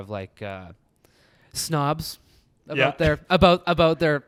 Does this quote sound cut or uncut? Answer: uncut